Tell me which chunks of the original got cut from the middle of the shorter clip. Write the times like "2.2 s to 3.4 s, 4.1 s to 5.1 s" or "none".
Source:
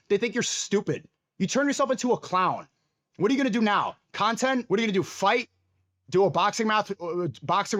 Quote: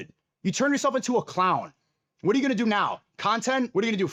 none